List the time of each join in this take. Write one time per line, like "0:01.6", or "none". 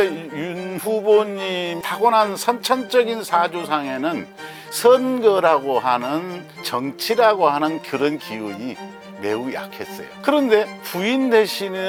none